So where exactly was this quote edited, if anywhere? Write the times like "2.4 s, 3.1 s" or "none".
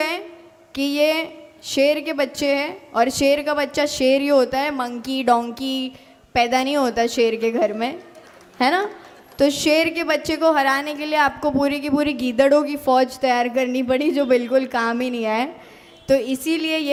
none